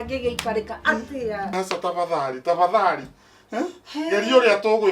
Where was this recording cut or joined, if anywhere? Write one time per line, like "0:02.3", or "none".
0:01.5